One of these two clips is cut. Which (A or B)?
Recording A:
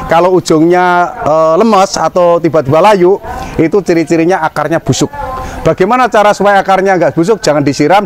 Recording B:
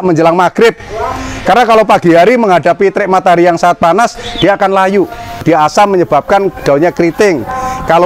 B